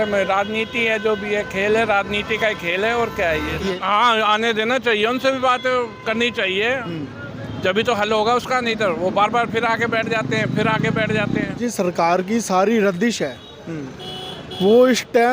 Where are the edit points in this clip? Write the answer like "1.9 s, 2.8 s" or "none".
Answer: 3.7 s, 11.6 s